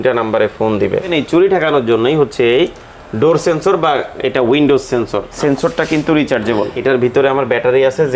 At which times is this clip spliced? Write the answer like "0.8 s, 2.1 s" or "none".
1.1 s, 5.3 s, 6.7 s

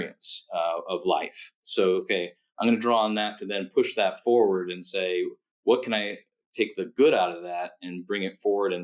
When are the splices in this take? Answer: none

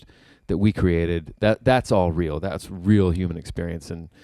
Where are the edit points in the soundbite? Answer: none

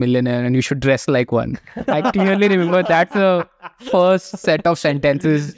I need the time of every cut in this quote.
none

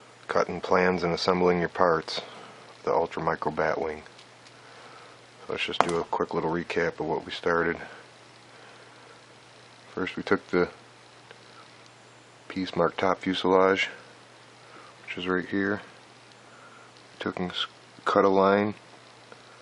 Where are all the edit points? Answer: none

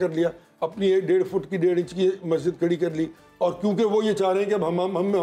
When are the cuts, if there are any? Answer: none

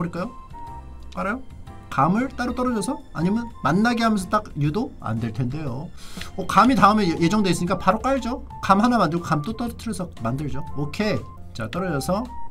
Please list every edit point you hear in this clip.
none

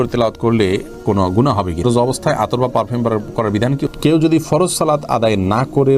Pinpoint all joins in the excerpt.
1.8 s, 3.9 s

